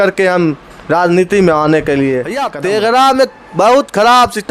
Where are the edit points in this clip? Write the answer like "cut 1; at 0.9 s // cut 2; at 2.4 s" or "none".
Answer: cut 1; at 2.5 s